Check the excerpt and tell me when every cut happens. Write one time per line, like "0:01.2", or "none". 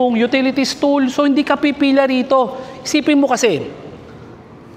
none